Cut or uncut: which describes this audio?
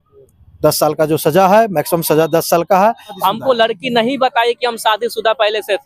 cut